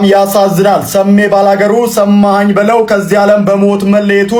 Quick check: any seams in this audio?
no; 0 cuts

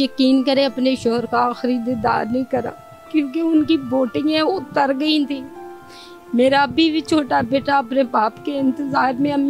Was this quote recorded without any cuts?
yes; 0 cuts

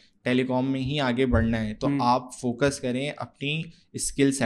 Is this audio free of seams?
yes; 0 cuts

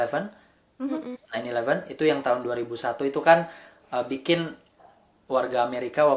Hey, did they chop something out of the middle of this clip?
no; 0 cuts

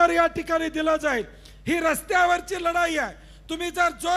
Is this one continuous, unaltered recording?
yes; 0 cuts

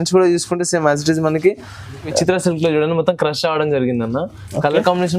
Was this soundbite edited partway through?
yes; 1 cut; at 2.1 s

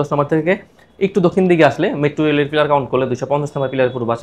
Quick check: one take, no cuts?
yes; 0 cuts

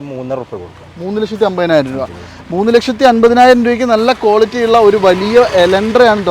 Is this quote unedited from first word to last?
yes; 0 cuts

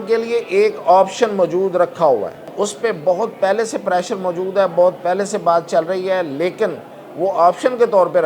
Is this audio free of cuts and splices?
no; 1 cut; at 2.4 s

